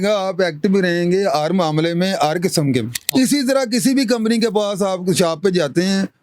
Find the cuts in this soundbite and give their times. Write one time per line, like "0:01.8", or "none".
0:03.0